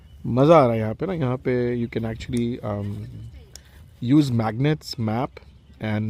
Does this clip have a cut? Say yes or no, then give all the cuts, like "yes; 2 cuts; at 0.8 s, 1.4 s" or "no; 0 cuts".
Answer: no; 0 cuts